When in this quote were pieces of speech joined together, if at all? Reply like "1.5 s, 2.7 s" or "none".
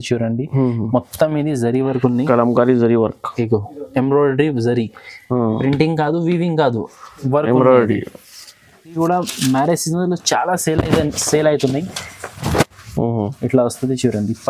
9.0 s